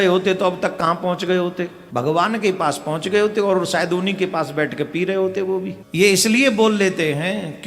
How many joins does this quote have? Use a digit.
2